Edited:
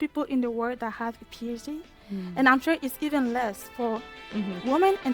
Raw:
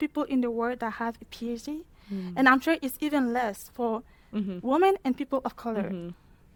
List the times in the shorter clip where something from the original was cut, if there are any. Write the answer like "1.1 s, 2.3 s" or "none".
none